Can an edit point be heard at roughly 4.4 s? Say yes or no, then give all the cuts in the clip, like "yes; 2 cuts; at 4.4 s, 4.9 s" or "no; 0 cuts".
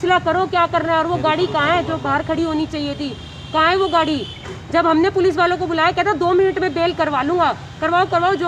no; 0 cuts